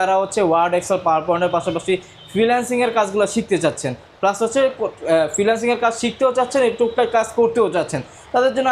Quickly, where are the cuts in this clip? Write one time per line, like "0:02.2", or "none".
none